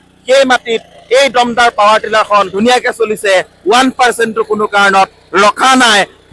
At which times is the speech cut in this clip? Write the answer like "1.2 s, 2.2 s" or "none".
2.5 s